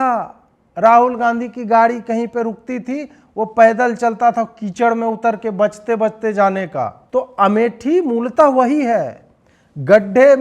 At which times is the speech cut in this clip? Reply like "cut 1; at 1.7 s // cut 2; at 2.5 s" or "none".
cut 1; at 7.0 s